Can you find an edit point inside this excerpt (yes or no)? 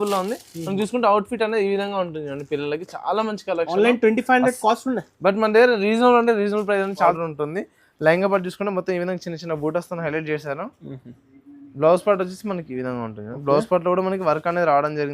yes